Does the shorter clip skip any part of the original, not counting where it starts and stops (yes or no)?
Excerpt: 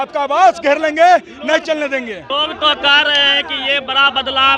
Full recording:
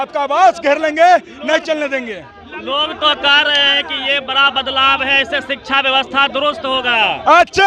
yes